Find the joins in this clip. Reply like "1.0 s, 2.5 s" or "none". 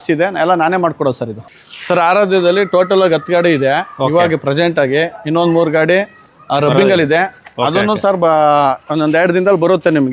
1.4 s